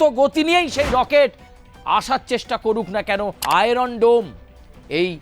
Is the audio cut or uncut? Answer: cut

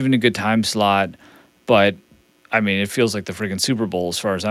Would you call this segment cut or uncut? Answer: uncut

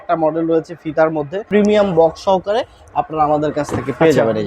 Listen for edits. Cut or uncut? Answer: cut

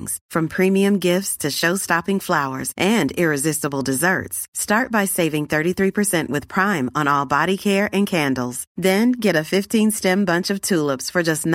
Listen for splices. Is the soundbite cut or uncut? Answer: uncut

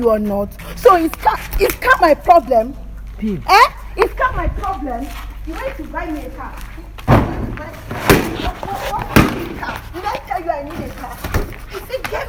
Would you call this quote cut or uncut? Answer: uncut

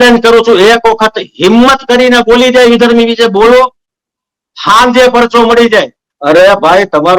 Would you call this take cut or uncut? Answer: cut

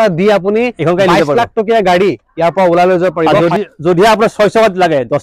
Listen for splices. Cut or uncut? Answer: uncut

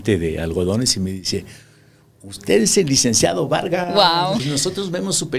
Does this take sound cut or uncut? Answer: cut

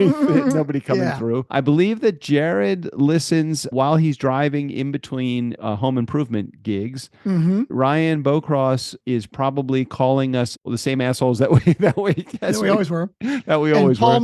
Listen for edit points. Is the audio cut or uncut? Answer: cut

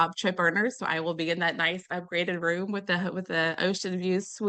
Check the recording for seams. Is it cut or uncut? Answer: uncut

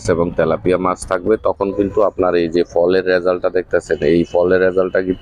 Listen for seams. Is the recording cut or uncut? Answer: uncut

